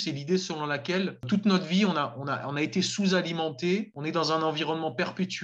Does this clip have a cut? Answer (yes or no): yes